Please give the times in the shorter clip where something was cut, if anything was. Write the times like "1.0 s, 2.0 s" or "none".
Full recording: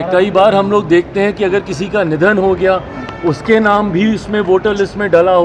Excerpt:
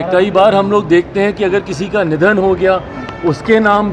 none